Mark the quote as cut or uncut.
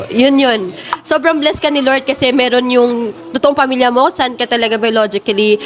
uncut